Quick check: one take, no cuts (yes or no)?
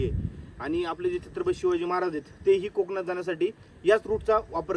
yes